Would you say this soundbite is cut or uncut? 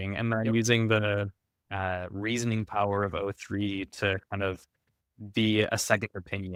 uncut